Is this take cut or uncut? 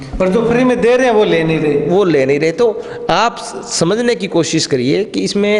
uncut